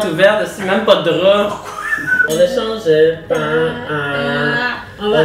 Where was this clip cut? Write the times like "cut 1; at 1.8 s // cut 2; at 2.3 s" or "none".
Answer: cut 1; at 2.2 s